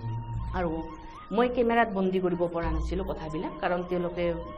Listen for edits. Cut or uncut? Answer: uncut